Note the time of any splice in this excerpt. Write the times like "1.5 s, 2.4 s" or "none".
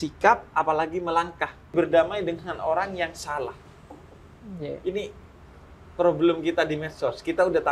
1.7 s